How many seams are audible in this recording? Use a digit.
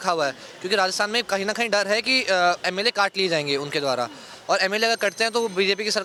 0